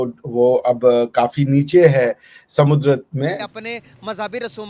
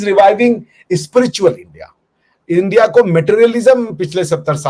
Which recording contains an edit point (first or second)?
first